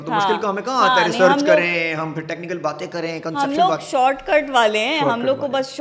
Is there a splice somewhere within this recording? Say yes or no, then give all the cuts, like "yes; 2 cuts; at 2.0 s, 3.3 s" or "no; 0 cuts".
no; 0 cuts